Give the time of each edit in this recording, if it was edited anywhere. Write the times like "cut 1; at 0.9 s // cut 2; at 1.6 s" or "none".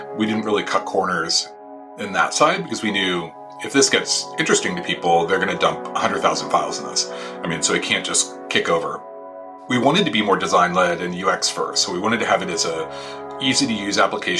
cut 1; at 1.9 s // cut 2; at 9.0 s